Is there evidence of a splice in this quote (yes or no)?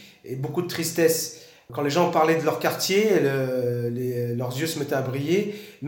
yes